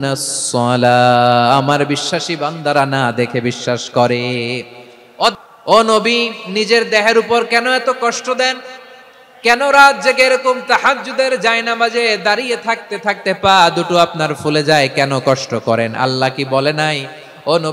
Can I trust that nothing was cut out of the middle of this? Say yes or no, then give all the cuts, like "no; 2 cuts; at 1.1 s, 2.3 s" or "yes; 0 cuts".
no; 1 cut; at 5.5 s